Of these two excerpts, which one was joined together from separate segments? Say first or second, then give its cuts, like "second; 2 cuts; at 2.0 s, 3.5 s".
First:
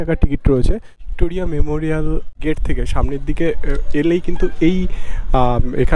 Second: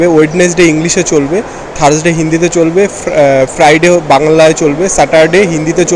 first; 2 cuts; at 0.9 s, 2.3 s